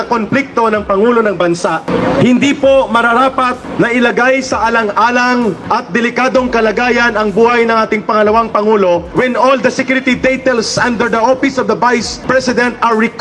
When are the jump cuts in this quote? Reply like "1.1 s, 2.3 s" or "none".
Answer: 1.9 s, 3.6 s, 5.6 s, 9.1 s, 12.1 s